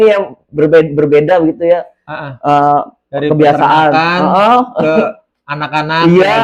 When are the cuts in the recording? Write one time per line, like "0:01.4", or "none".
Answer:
none